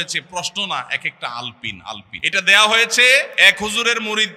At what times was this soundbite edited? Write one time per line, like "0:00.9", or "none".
0:02.1
0:03.3

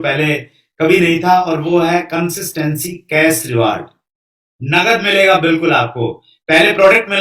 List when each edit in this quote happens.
none

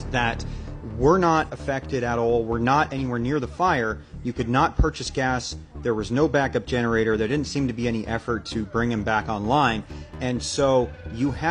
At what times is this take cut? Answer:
none

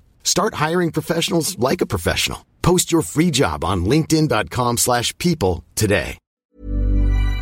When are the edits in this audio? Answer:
0:06.2

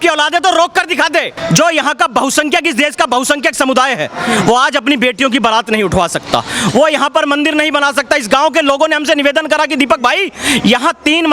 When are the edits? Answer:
0:01.3

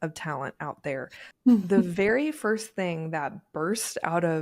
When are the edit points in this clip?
0:01.2

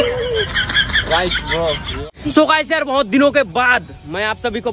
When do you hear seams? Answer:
0:02.0

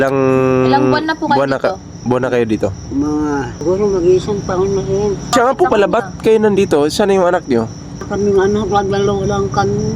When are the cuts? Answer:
0:03.6
0:05.3
0:08.1

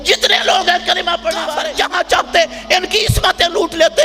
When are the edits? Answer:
0:01.6

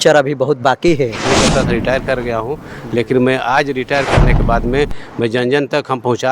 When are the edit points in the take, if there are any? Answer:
0:01.2

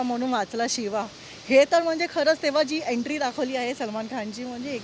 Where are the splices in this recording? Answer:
none

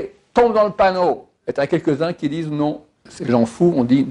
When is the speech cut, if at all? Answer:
0:01.3
0:03.1

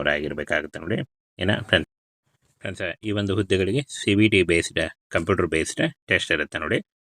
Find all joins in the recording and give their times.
0:01.9

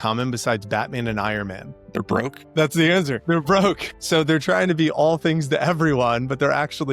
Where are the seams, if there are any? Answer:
0:01.9

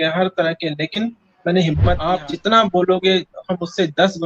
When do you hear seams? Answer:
0:02.0

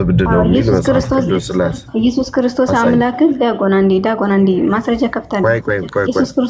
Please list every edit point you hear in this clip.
none

